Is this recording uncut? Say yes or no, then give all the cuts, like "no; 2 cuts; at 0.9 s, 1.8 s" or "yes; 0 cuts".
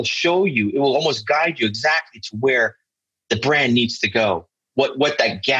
yes; 0 cuts